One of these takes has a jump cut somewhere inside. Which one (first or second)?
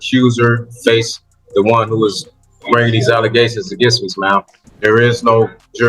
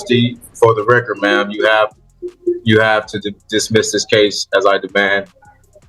first